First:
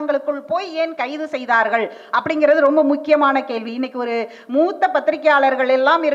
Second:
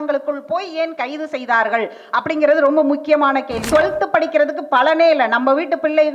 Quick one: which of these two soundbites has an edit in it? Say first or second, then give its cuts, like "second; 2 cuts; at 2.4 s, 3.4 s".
second; 1 cut; at 3.6 s